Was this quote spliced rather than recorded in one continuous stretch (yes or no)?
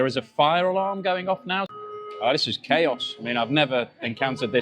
yes